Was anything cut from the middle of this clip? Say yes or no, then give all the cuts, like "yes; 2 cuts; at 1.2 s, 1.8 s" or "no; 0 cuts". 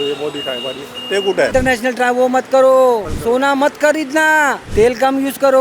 yes; 3 cuts; at 1.5 s, 3.1 s, 4.6 s